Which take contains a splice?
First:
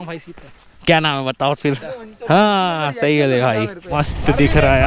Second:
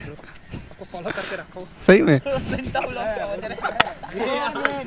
first; 1 cut; at 3.8 s

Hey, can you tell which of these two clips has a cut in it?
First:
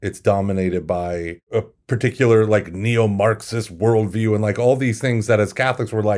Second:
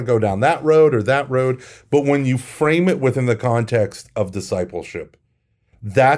first; 1 cut; at 1.4 s

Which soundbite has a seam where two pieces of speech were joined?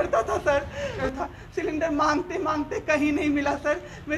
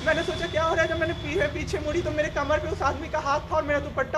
first; 1 cut; at 1.0 s

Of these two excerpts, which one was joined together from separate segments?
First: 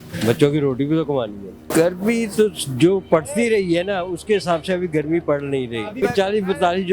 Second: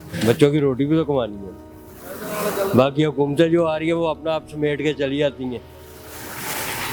first; 2 cuts; at 1.6 s, 6.0 s

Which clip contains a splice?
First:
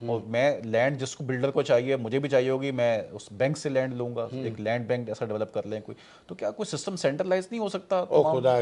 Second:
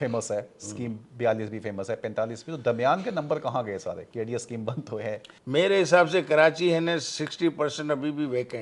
second; 1 cut; at 5.3 s

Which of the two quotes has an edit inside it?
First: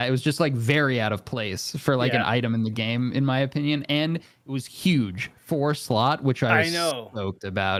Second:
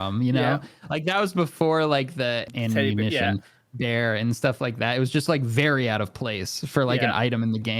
second; 1 cut; at 2.5 s

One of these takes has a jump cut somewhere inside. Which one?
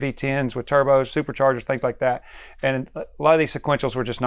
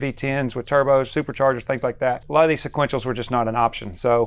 second; 1 cut; at 2.2 s

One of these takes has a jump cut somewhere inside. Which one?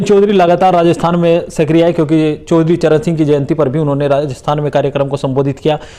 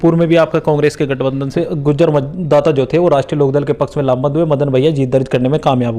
second; 1 cut; at 1.5 s

